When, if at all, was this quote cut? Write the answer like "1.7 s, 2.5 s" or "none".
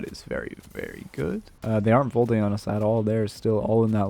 1.5 s